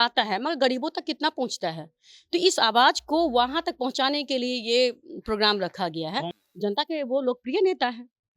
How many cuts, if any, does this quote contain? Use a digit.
1